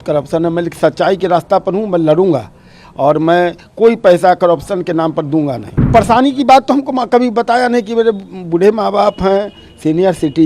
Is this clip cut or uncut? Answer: cut